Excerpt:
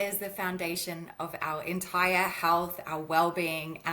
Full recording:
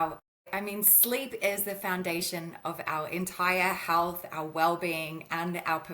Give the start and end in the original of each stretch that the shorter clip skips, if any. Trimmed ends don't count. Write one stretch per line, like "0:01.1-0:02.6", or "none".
none